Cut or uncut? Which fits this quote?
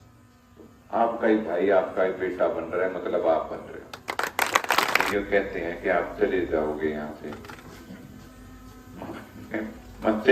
cut